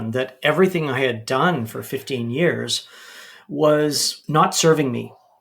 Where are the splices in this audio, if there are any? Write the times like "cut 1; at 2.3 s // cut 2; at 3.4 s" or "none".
cut 1; at 4.1 s